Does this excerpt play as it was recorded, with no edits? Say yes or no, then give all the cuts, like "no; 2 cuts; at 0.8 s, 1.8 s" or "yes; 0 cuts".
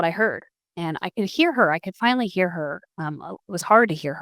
yes; 0 cuts